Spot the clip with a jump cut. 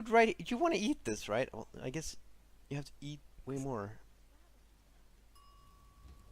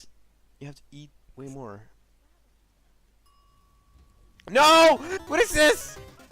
second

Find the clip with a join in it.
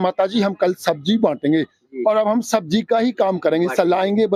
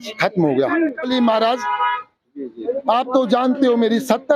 second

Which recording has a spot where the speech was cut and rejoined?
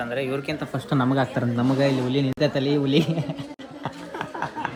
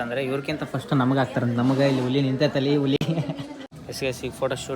second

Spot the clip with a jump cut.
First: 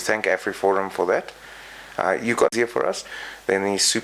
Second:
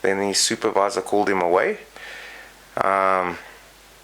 first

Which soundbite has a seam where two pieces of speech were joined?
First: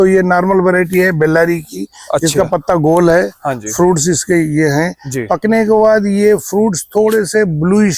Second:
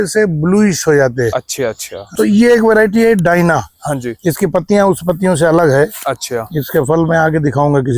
second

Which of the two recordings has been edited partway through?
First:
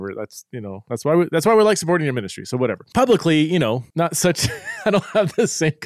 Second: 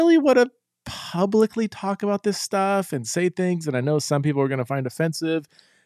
first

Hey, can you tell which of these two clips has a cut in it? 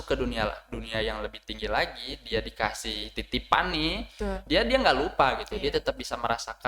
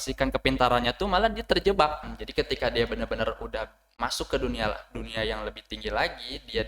second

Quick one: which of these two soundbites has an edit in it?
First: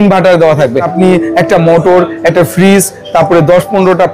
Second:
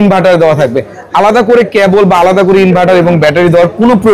first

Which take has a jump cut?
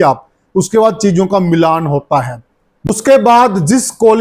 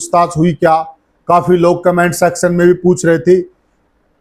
first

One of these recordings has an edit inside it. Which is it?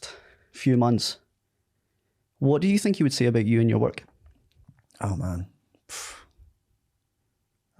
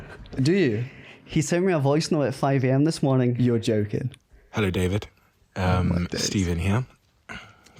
second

